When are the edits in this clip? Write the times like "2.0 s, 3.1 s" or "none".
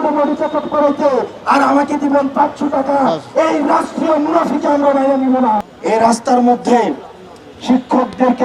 5.6 s